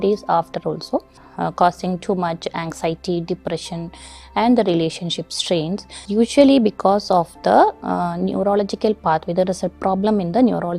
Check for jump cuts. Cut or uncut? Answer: cut